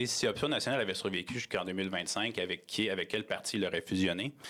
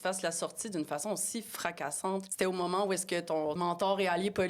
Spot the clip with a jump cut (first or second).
second